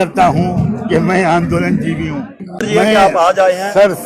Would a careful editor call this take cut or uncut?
cut